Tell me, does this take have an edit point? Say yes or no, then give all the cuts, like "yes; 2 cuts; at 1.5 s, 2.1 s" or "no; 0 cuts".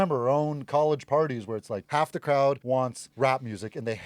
yes; 2 cuts; at 1.8 s, 2.7 s